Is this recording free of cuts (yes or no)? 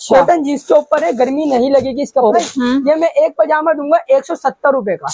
no